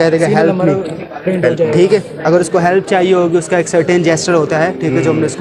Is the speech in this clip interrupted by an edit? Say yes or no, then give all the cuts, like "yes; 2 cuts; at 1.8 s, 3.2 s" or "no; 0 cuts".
no; 0 cuts